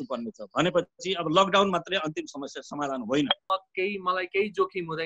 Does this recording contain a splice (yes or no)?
yes